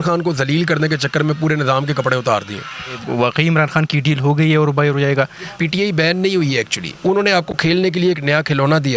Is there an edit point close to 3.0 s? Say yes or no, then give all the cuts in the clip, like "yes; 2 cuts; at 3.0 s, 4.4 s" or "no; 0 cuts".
yes; 2 cuts; at 3.0 s, 5.5 s